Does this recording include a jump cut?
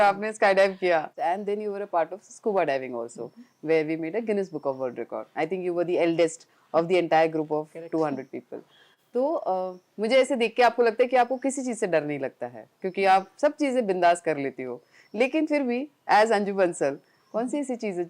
yes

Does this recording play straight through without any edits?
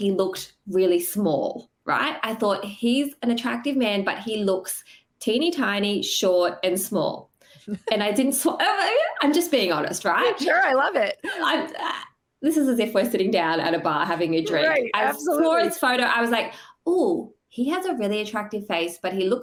yes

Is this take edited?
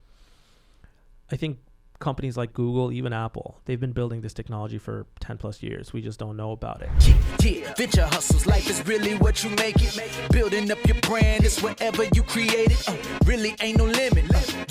yes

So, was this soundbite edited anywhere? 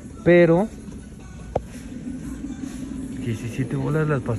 no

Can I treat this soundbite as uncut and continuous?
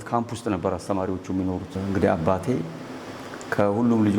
no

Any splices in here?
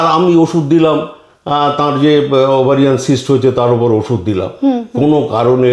no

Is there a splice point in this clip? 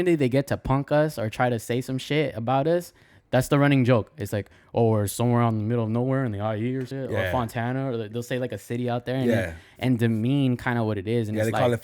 yes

